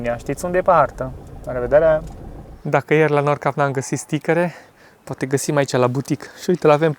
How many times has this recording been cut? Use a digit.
1